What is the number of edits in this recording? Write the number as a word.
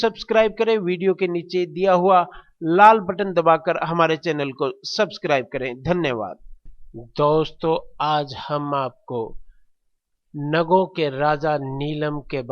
one